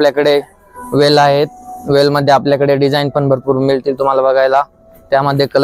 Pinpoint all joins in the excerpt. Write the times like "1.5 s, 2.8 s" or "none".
none